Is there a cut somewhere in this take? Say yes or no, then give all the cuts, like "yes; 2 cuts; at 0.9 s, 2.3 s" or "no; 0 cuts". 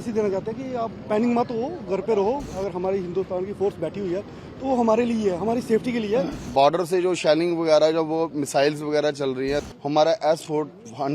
yes; 3 cuts; at 2.5 s, 6.5 s, 9.6 s